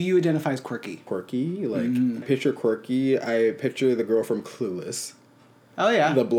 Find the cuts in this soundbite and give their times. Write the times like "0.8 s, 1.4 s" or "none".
0.9 s, 2.2 s